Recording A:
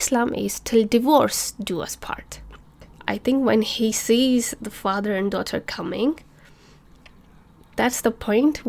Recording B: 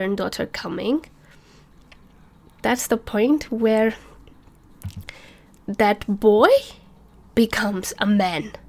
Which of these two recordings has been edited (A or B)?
A